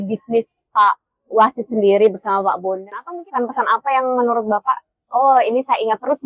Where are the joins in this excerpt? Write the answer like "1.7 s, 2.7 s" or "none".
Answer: 3.0 s